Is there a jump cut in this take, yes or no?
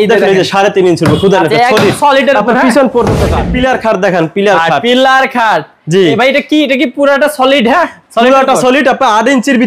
yes